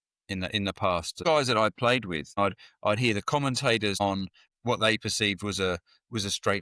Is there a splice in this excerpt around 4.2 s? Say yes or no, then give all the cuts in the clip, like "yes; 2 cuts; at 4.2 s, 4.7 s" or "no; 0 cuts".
yes; 3 cuts; at 1.2 s, 2.4 s, 4.2 s